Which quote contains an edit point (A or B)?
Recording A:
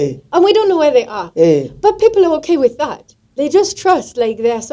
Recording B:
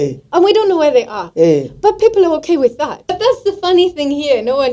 B